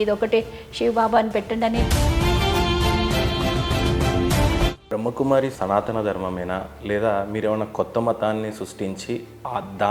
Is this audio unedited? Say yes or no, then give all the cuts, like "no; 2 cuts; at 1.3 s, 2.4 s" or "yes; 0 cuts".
yes; 0 cuts